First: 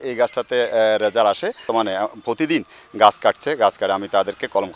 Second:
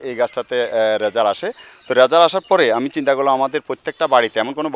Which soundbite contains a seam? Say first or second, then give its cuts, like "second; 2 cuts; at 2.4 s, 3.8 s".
first; 1 cut; at 1.7 s